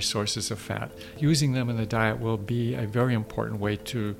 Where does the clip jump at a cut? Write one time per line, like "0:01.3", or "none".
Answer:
0:01.1